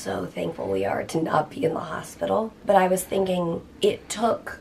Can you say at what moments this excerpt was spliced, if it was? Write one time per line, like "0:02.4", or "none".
0:02.6
0:03.7